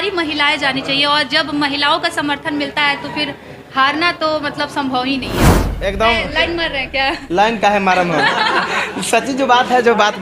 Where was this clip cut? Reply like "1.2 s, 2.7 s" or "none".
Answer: 5.6 s